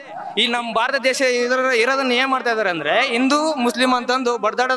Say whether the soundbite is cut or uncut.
uncut